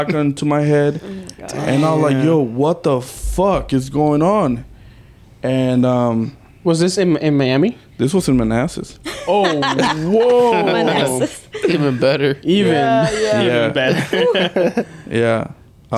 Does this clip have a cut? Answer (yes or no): no